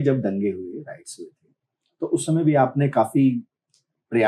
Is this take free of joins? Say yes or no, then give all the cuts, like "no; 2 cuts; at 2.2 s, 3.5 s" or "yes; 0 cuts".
yes; 0 cuts